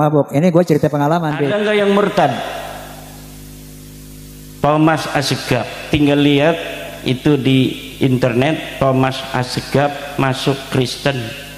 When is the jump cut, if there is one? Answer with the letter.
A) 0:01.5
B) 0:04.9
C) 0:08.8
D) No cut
A